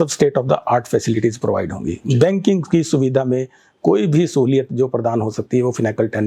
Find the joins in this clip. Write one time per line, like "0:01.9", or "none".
none

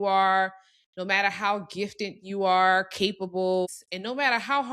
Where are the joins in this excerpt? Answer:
0:03.8

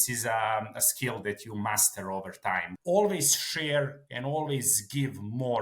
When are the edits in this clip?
0:02.7

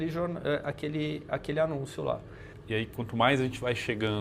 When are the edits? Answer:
0:02.5

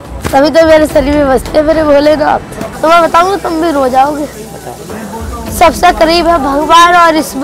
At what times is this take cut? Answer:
0:02.6

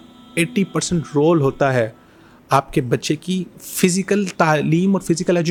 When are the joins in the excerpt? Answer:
none

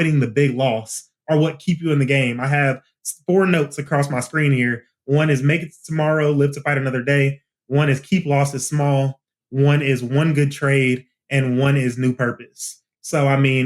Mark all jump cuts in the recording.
0:03.8

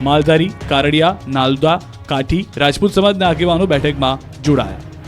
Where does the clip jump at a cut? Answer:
0:02.0

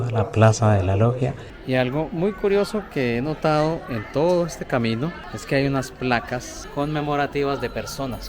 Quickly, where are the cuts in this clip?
0:01.5
0:05.3
0:06.6

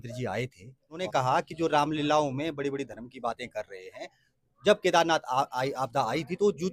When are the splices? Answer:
0:01.0

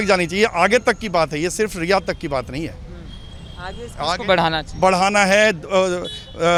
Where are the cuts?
none

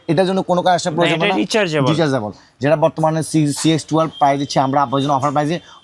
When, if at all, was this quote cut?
none

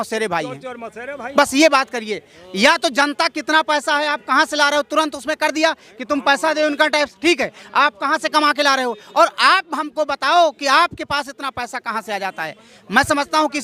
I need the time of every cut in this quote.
none

